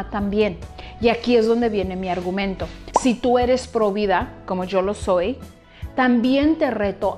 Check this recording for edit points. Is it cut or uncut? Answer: cut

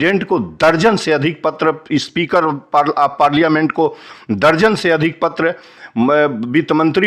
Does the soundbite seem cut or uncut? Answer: uncut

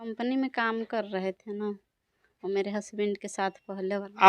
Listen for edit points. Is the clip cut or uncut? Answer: uncut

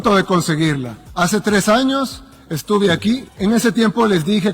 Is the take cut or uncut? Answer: cut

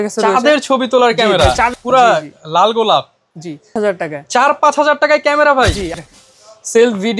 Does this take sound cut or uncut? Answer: cut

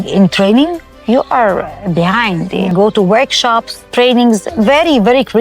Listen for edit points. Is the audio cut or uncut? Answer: cut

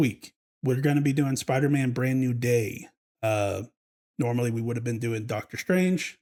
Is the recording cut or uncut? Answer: uncut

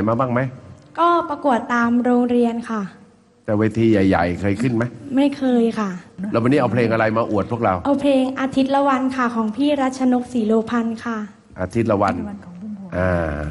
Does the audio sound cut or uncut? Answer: uncut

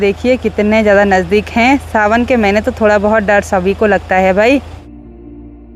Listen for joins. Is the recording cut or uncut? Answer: uncut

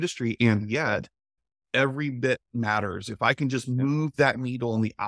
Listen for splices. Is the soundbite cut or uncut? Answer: cut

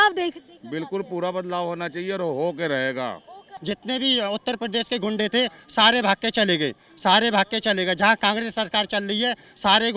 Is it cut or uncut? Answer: cut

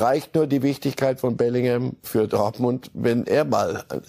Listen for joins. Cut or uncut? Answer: cut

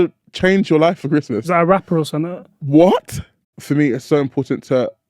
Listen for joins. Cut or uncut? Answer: cut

